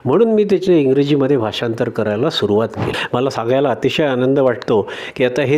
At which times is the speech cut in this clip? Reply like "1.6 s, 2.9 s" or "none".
2.9 s